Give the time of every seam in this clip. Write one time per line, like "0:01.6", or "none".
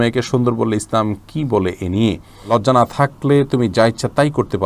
0:02.5